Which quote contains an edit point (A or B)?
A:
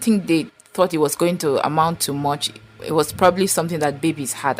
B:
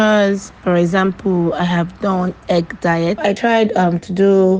B